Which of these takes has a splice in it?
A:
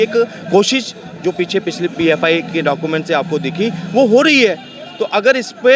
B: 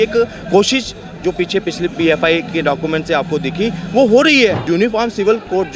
B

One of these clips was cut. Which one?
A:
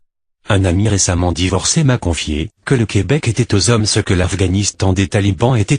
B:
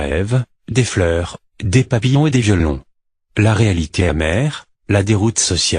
A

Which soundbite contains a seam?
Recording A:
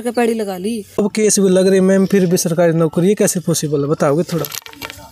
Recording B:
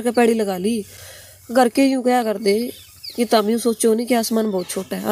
A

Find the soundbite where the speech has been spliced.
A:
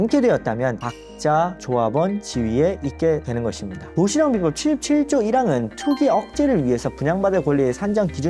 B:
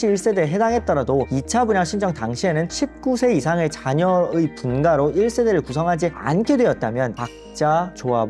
A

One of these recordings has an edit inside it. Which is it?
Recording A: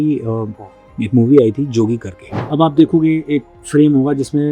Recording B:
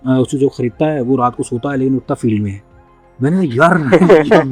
A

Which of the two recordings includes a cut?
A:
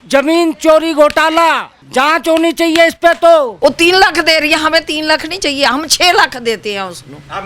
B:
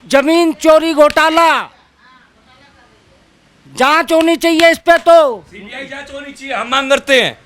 A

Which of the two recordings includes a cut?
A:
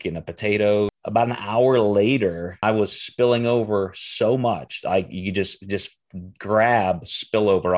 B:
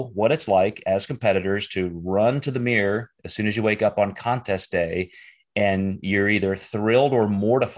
A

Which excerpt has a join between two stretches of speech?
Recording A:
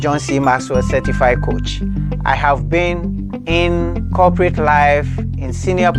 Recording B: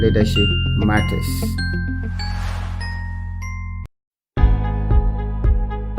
B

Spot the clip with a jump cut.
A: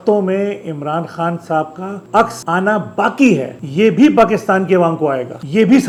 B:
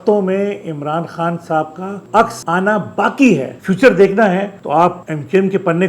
B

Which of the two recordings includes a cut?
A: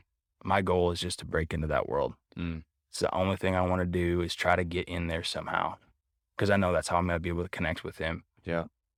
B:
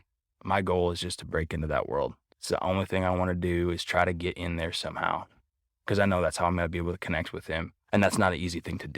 B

